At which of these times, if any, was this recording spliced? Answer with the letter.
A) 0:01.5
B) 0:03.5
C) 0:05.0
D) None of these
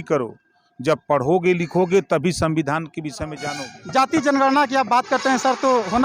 B